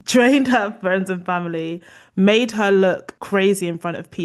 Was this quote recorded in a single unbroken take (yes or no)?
yes